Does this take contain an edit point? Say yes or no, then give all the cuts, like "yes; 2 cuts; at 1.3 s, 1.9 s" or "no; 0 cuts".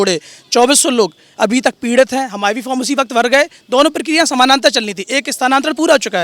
no; 0 cuts